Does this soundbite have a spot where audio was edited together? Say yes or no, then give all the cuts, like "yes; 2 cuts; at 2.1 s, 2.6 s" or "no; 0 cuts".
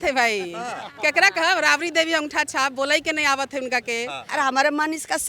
yes; 1 cut; at 4.3 s